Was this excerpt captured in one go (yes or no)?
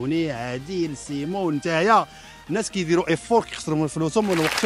yes